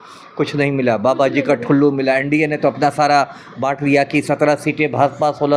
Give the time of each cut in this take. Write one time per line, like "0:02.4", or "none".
none